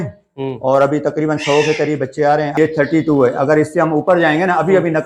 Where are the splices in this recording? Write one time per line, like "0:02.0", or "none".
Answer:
0:02.5